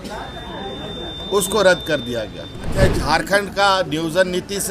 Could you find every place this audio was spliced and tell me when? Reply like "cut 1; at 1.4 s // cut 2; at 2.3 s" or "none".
cut 1; at 2.7 s